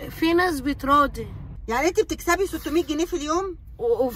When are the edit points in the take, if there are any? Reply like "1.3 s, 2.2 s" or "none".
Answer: 1.5 s

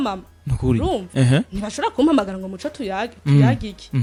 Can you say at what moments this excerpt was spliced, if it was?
none

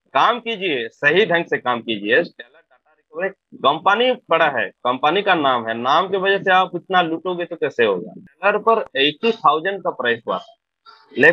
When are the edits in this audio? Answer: 8.2 s

